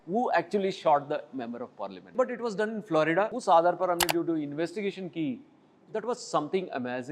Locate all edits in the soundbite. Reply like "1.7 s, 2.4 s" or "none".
2.1 s, 3.4 s